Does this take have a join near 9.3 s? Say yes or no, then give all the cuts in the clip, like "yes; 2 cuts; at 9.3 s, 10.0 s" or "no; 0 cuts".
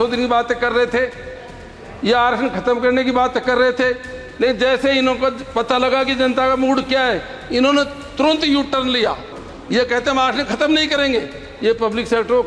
yes; 1 cut; at 9.3 s